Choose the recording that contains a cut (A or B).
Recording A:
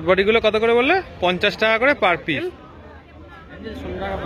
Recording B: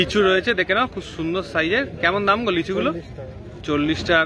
A